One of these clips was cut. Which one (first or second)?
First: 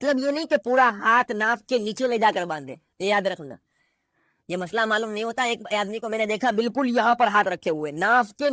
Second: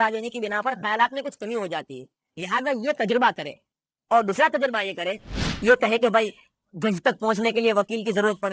second